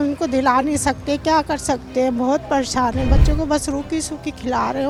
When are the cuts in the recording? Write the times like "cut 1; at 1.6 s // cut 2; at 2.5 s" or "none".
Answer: none